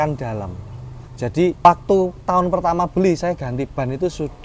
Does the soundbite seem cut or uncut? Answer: cut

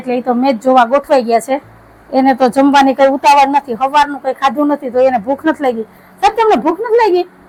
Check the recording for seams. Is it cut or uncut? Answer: uncut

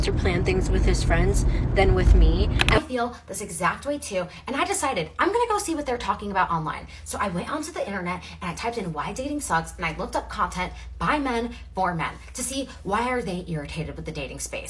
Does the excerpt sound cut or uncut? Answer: cut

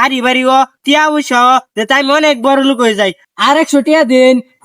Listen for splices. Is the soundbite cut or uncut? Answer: cut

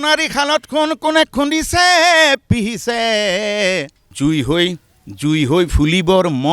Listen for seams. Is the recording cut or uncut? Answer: cut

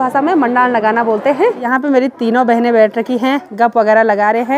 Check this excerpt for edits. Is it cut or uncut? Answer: cut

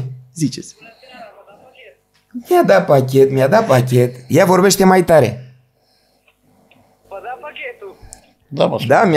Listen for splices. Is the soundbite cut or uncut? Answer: uncut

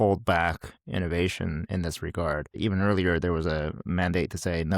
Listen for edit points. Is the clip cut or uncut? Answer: cut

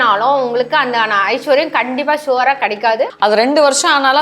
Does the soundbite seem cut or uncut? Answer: cut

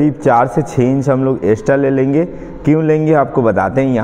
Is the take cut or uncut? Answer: uncut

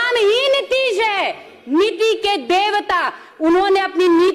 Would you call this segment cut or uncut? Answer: uncut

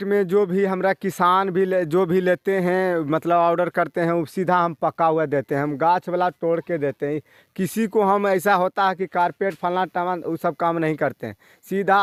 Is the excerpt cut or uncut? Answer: uncut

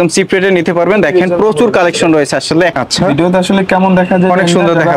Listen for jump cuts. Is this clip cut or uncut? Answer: cut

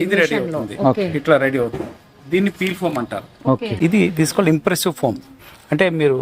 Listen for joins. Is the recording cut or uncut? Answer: cut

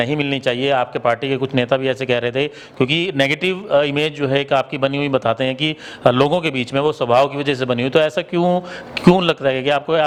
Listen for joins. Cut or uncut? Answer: uncut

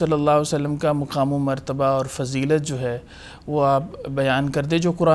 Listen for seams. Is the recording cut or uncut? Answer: uncut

